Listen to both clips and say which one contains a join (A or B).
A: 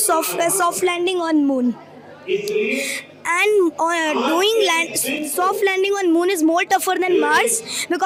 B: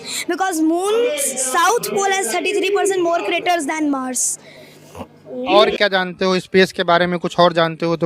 B